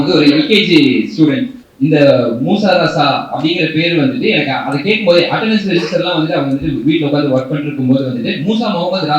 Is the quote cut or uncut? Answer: cut